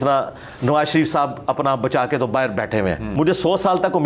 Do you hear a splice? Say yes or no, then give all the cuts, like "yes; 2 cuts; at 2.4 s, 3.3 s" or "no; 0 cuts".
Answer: yes; 1 cut; at 3.1 s